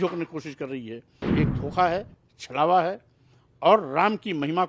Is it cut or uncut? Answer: cut